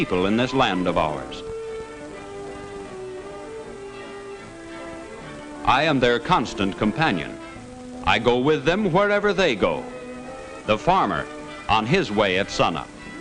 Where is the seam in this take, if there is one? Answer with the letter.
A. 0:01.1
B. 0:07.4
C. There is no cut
A